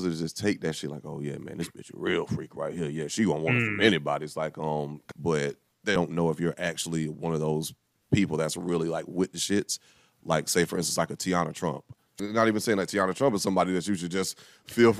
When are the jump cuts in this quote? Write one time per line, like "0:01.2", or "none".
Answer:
0:05.0
0:05.9
0:12.1